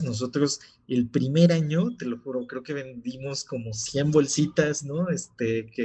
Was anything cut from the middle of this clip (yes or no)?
no